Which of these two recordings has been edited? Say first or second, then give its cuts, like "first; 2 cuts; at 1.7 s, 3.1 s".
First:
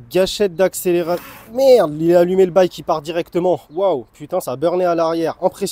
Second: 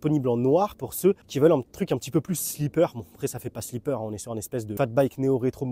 second; 2 cuts; at 1.3 s, 4.8 s